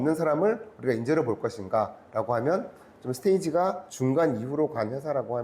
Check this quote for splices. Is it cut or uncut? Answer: cut